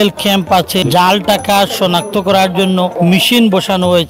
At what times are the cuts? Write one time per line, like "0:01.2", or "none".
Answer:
0:00.8
0:02.9